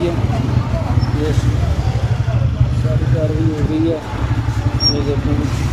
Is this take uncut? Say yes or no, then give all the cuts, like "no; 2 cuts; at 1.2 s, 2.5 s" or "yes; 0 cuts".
yes; 0 cuts